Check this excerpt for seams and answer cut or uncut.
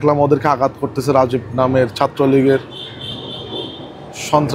uncut